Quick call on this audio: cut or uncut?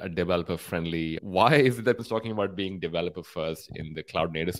cut